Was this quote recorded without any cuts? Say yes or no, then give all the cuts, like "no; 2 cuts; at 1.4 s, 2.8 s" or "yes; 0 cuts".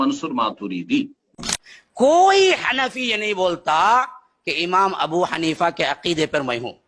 no; 1 cut; at 1.6 s